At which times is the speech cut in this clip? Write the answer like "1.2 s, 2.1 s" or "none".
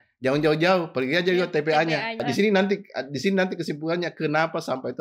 2.2 s